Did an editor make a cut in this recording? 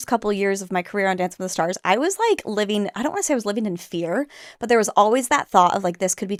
no; 0 cuts

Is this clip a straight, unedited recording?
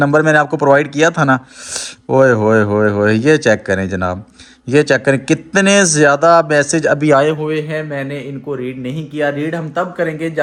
yes; 0 cuts

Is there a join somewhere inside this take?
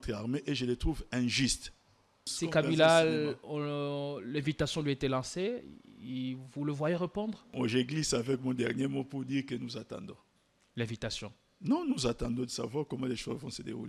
yes; 2 cuts; at 2.2 s, 7.4 s

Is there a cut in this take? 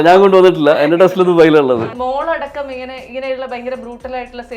yes; 1 cut; at 1.9 s

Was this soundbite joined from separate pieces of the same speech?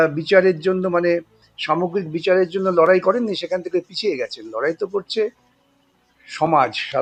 no; 0 cuts

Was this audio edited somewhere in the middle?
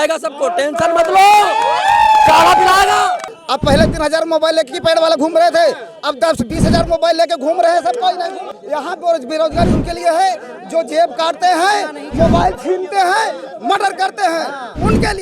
yes; 2 cuts; at 3.3 s, 8.5 s

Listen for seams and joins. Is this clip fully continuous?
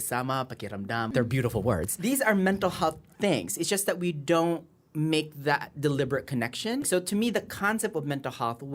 no; 3 cuts; at 1.1 s, 1.9 s, 6.9 s

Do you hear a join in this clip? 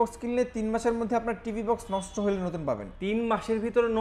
yes; 1 cut; at 2.9 s

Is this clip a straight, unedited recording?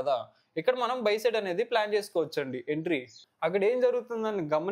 no; 1 cut; at 3.2 s

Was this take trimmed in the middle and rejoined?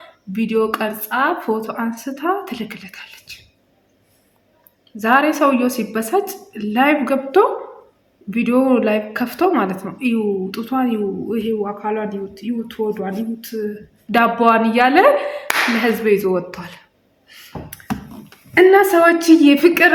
no; 0 cuts

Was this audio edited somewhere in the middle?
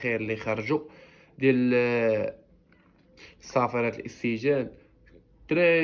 no; 0 cuts

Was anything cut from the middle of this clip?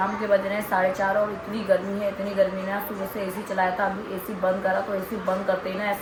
no; 0 cuts

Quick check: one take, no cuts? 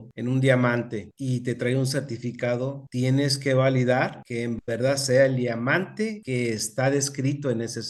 yes; 0 cuts

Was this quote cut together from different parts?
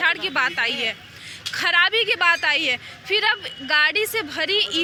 no; 0 cuts

